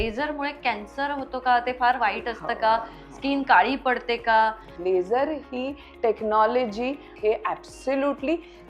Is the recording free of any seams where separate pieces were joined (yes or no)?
no